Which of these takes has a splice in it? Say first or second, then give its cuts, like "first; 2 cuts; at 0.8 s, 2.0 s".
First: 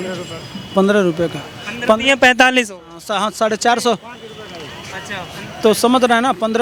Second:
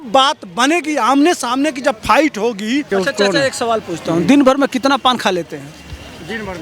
second; 1 cut; at 2.9 s